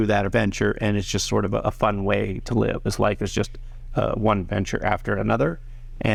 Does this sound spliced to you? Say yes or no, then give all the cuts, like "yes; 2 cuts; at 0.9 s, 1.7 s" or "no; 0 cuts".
no; 0 cuts